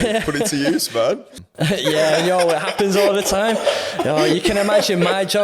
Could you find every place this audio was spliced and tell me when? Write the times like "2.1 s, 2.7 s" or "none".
1.2 s